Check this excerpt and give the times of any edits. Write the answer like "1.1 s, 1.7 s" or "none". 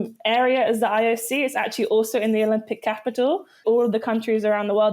3.6 s